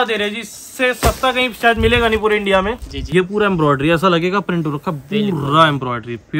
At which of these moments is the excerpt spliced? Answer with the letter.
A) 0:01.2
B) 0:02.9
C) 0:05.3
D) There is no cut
B